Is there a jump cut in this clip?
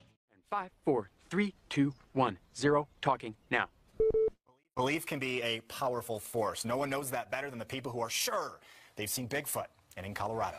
no; 0 cuts

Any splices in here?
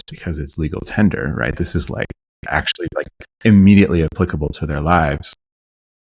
no; 0 cuts

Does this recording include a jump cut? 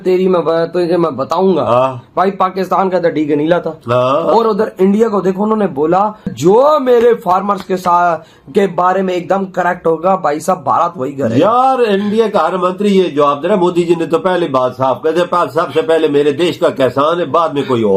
no; 0 cuts

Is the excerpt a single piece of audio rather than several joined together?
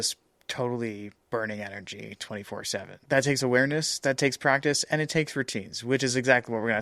yes; 0 cuts

